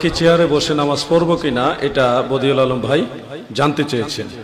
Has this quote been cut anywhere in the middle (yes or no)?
no